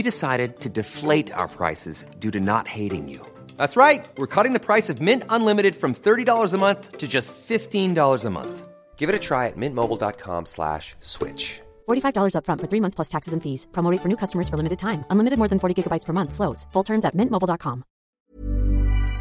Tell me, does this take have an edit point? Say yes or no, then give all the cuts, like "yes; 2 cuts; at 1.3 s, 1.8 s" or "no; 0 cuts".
yes; 1 cut; at 18.1 s